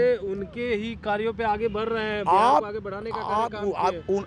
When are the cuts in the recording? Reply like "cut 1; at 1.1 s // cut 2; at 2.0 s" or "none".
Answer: none